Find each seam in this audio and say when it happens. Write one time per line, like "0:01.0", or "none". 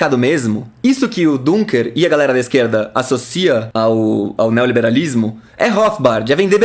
0:03.7